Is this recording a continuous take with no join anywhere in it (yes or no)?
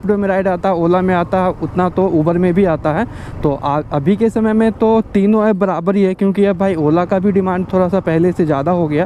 yes